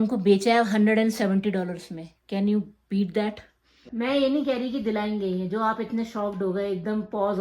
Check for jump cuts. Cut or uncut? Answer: cut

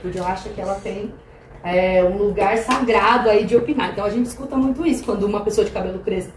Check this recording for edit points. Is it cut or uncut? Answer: uncut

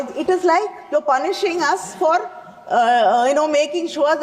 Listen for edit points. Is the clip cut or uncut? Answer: uncut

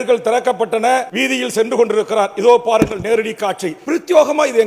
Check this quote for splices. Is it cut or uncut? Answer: cut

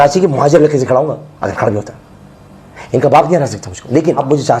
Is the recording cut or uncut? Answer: uncut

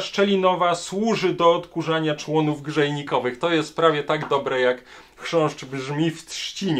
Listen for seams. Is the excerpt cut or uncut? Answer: uncut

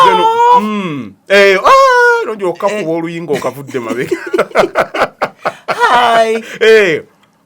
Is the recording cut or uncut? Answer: uncut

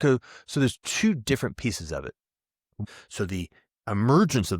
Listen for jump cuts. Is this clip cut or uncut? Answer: cut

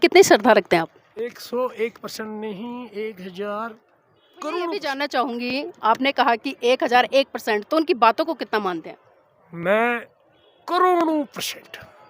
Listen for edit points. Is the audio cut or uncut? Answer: cut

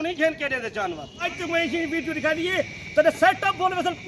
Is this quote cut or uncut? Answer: cut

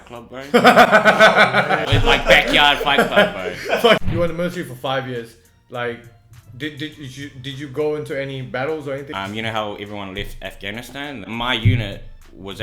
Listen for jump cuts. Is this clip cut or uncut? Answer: cut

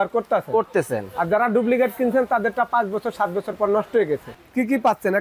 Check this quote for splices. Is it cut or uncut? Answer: cut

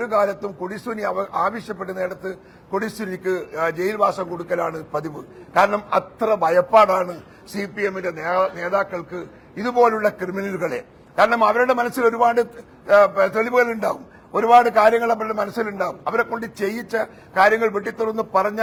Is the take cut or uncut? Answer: uncut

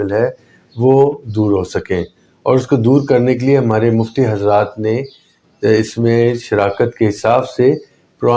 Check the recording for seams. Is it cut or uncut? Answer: uncut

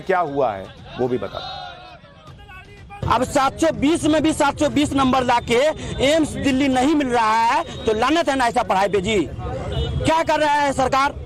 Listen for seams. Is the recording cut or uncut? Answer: uncut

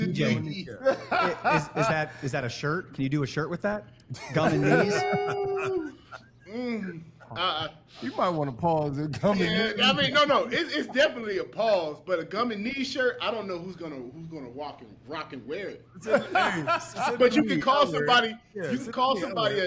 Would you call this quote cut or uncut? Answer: uncut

